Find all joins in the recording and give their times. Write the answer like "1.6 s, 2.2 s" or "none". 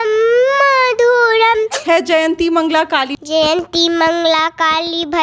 1.7 s, 3.1 s